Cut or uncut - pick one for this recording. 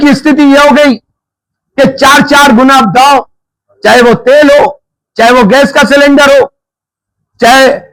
uncut